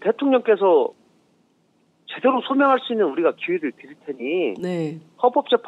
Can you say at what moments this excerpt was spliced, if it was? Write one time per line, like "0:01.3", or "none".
0:02.9